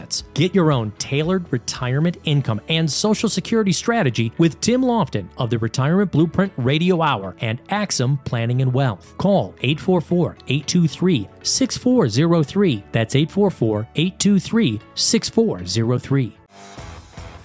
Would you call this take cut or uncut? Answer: cut